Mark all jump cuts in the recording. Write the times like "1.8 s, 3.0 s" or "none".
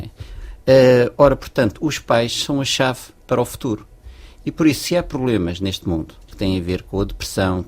6.3 s